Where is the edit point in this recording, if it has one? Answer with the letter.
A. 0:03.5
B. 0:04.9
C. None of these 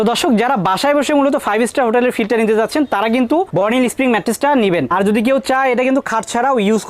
B